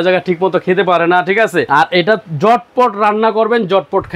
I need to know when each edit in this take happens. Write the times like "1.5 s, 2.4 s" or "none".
1.7 s